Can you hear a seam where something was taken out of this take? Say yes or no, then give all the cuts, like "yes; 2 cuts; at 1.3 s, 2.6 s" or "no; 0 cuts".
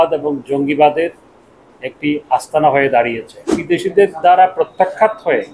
yes; 1 cut; at 3.6 s